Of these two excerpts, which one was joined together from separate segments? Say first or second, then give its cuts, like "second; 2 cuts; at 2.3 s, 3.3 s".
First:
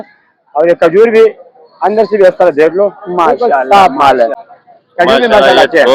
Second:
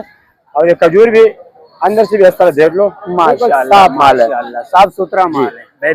first; 1 cut; at 4.5 s